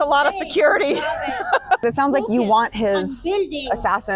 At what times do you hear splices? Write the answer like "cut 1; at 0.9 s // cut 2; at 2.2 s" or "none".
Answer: cut 1; at 1.8 s